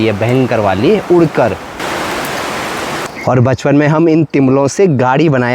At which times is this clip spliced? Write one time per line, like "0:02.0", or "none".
0:01.8
0:03.1